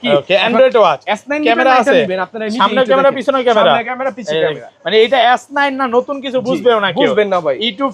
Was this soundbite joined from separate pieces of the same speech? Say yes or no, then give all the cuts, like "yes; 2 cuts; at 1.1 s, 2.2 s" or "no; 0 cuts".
no; 0 cuts